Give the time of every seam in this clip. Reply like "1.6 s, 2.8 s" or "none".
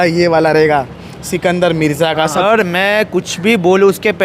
2.4 s